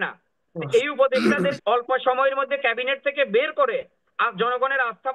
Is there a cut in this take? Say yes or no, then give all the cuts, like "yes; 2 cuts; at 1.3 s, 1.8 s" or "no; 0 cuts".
yes; 1 cut; at 1.6 s